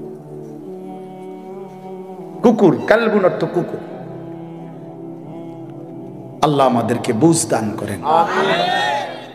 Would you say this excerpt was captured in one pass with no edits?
yes; 0 cuts

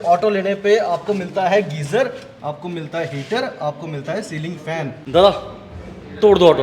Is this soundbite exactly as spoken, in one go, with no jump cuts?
no; 1 cut; at 5.0 s

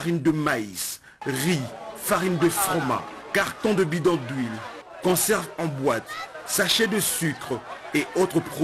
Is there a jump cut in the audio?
no; 0 cuts

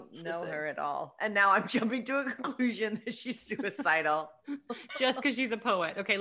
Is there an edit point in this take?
no; 0 cuts

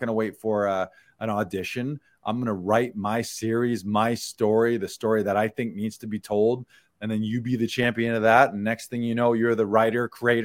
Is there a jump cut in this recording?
no; 0 cuts

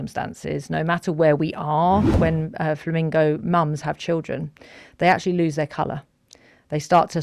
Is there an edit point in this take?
yes; 1 cut; at 2.2 s

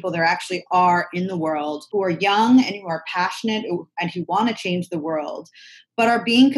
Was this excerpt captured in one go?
no; 1 cut; at 1.8 s

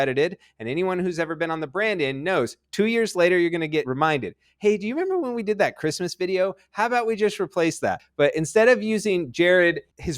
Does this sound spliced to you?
yes; 1 cut; at 3.9 s

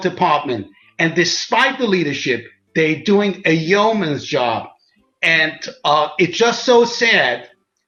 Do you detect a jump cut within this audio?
no; 0 cuts

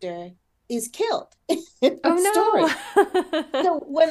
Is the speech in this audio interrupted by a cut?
no; 0 cuts

